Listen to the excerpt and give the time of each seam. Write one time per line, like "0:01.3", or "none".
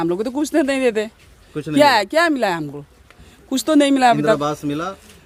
none